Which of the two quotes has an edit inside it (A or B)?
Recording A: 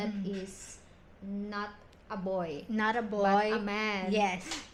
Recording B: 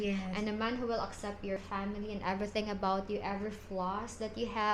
B